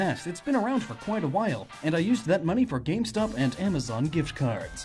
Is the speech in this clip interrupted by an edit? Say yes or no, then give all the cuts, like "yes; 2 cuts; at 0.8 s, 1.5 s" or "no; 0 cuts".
yes; 1 cut; at 3.5 s